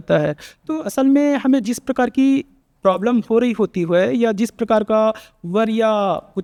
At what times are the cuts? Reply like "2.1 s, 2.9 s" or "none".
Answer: none